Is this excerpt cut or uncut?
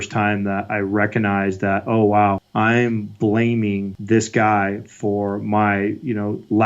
cut